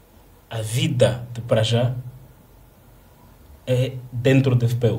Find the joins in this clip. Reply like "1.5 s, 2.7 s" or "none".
none